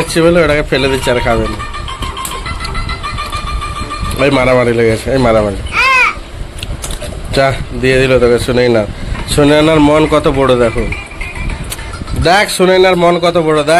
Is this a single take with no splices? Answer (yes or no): yes